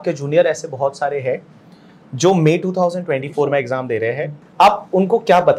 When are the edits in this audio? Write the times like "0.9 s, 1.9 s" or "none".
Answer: 4.4 s